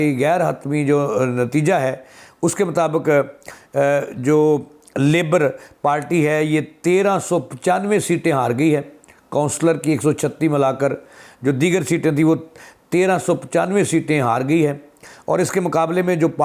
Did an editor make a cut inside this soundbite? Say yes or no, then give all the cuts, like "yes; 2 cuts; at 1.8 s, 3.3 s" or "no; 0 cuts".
no; 0 cuts